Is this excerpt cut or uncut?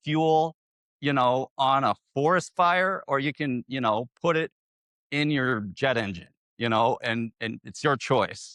uncut